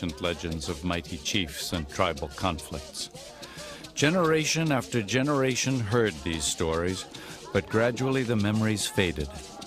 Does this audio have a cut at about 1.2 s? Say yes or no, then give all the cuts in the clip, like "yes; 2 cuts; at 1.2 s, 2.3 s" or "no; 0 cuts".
no; 1 cut; at 5.2 s